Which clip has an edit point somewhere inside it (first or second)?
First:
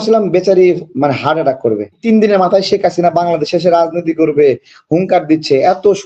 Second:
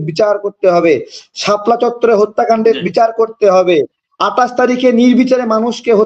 first